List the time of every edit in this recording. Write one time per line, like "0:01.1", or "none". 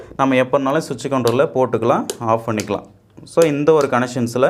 none